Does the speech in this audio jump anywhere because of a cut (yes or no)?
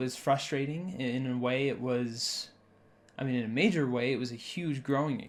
no